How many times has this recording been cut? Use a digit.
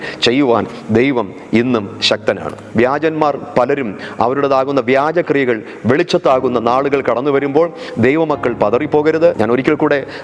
2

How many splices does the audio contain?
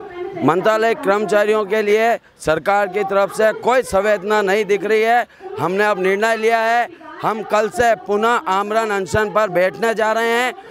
0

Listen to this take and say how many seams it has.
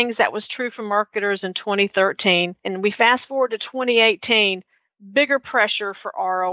1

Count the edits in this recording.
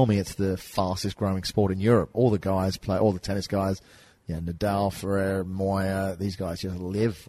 1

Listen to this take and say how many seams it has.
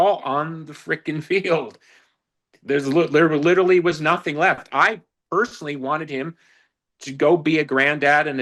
0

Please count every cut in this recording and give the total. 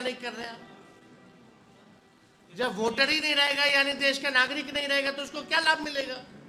0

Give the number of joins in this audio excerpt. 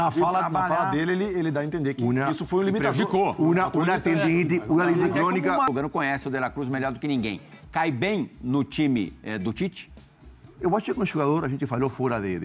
1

